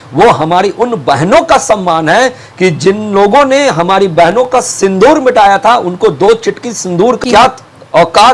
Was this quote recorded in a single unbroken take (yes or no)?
no